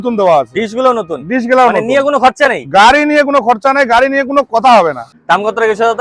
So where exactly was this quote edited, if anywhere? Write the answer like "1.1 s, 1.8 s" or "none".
5.1 s